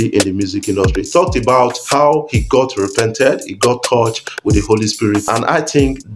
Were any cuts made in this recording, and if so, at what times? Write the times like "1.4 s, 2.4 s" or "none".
1.8 s, 5.2 s